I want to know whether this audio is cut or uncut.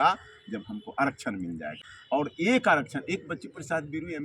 cut